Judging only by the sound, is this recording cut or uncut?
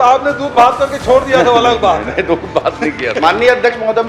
uncut